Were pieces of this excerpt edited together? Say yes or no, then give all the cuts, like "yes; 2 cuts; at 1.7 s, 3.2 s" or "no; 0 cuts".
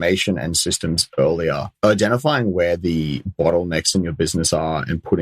yes; 1 cut; at 1.7 s